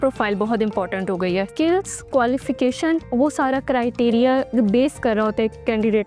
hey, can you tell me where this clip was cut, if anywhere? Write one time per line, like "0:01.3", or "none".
0:01.5